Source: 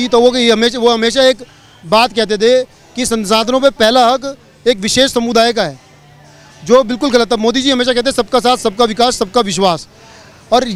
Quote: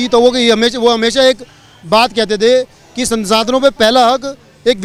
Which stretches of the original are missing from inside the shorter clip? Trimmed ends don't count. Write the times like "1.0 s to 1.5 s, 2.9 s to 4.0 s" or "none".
none